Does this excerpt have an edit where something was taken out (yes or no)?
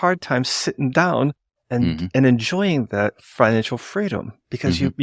no